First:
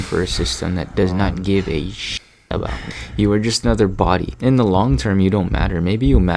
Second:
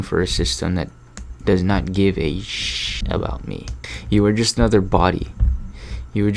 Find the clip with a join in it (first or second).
first